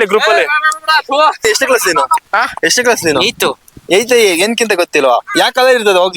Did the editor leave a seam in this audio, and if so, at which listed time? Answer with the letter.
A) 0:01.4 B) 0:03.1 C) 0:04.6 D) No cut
A